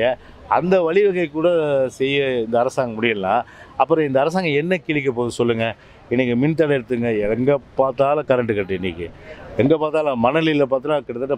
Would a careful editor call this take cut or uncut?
uncut